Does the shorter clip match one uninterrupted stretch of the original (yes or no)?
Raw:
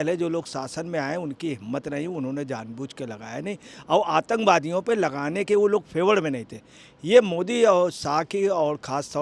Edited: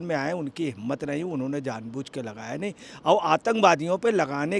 yes